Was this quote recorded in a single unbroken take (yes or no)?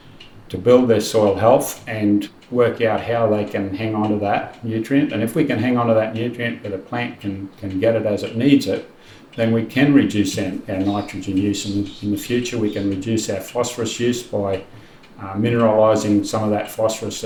yes